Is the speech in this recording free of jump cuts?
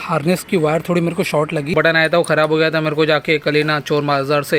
no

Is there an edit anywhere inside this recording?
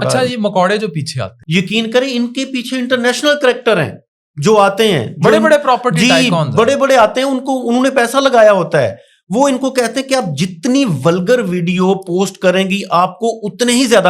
yes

